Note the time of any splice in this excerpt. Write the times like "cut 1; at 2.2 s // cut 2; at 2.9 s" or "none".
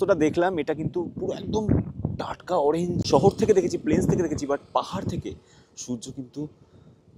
cut 1; at 3.0 s